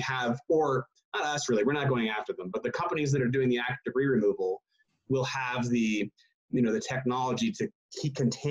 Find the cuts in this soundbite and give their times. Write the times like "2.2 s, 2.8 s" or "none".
none